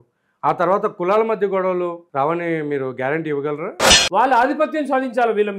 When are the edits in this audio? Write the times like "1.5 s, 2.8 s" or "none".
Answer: 2.0 s, 3.9 s